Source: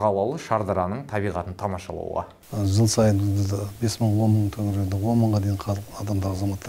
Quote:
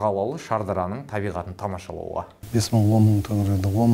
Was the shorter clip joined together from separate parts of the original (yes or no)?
yes